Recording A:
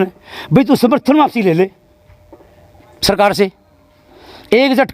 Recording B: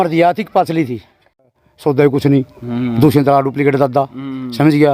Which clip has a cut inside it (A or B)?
B